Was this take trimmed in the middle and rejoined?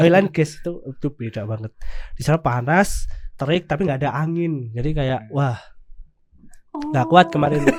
no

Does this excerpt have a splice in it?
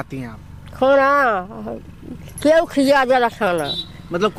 no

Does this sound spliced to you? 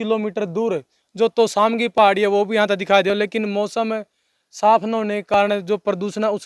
no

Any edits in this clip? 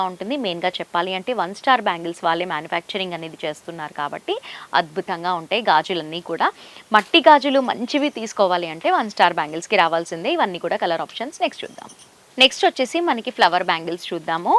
no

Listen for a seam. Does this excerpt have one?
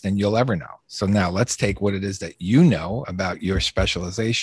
no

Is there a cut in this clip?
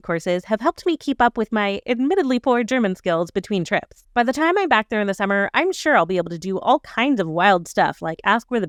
no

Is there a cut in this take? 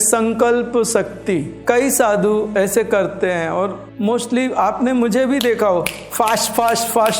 yes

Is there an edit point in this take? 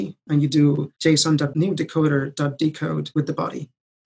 yes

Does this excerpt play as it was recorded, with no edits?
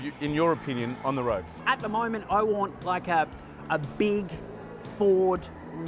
no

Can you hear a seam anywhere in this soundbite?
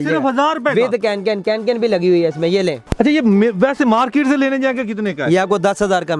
no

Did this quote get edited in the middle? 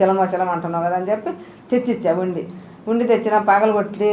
no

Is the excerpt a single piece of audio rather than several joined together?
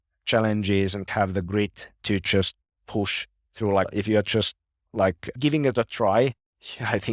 no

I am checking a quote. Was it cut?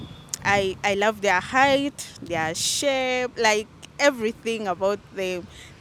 no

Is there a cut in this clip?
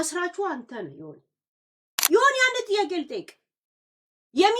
yes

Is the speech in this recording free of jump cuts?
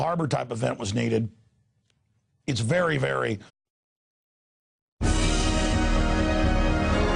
yes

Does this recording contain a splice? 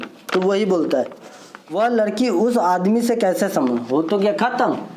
yes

